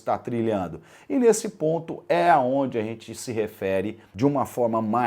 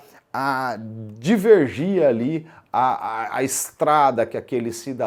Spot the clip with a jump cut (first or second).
first